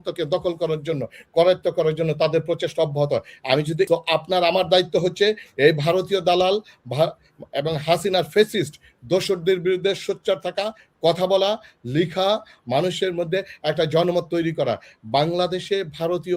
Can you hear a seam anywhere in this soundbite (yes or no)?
yes